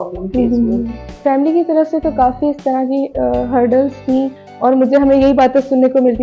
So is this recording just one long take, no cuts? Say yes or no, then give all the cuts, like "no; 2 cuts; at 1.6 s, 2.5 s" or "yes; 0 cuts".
no; 2 cuts; at 1.0 s, 4.4 s